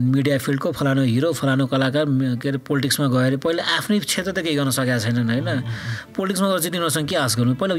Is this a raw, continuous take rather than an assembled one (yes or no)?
yes